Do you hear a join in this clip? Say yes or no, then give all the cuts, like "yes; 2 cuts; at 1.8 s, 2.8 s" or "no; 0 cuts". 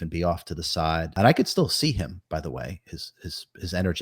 yes; 1 cut; at 1.1 s